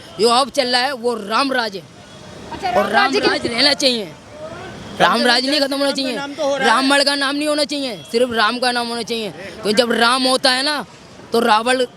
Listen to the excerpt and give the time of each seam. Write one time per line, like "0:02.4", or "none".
none